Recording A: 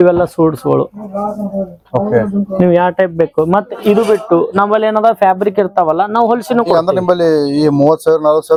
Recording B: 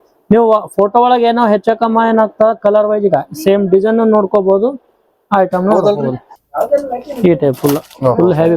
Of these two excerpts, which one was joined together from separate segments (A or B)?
B